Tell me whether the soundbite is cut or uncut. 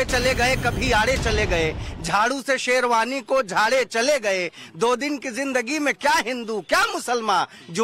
uncut